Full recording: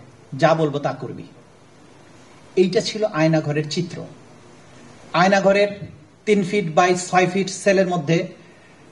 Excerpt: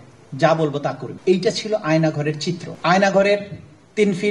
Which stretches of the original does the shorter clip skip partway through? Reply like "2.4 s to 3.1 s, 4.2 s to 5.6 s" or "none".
1.1 s to 2.4 s, 4.0 s to 5.0 s